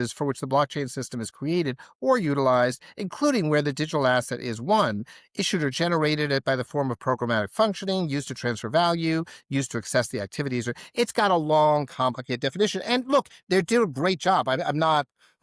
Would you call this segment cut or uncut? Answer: uncut